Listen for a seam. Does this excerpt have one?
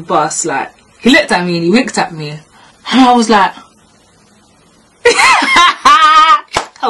no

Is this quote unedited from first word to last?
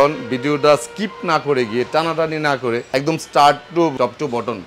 no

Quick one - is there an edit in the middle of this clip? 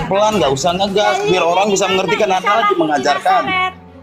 no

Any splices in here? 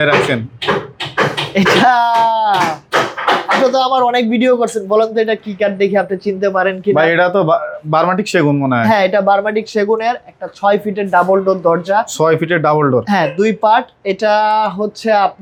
no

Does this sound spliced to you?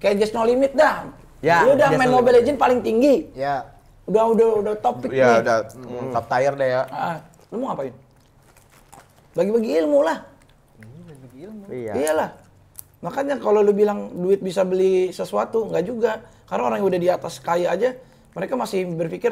no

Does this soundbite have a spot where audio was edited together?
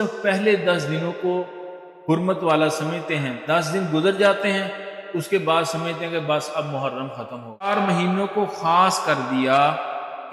yes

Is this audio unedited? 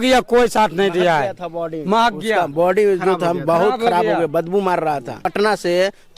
no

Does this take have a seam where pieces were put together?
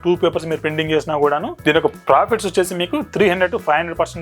yes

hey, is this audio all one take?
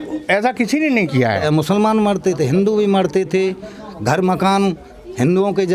no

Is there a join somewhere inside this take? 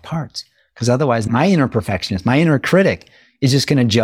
yes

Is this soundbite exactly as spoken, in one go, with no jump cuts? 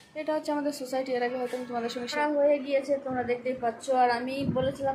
no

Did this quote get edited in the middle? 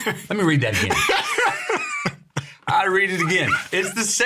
no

